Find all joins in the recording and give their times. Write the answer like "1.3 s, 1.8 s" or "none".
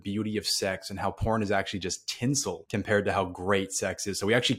2.6 s